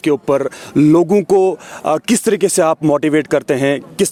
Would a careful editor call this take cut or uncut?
uncut